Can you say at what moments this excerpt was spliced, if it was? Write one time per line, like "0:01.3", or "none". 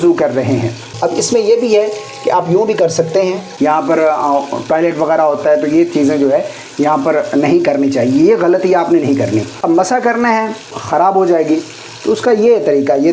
0:00.9
0:03.5
0:09.5
0:10.8